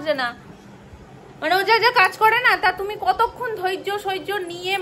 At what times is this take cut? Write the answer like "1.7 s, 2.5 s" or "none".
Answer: none